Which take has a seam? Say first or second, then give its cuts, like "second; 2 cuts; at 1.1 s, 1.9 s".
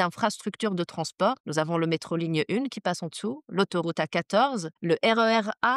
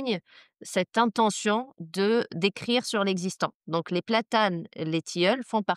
first; 2 cuts; at 1.4 s, 4.7 s